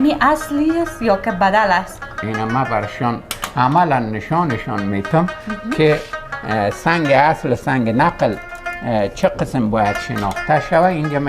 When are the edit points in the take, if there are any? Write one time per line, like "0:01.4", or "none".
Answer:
0:02.2